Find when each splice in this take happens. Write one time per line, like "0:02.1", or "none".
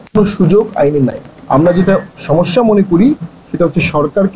0:01.3